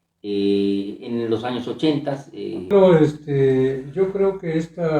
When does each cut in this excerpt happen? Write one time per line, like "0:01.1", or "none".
0:02.7